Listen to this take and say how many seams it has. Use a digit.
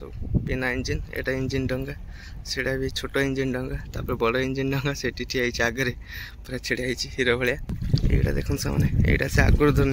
1